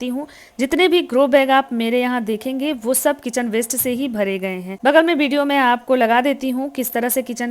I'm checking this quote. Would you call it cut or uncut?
cut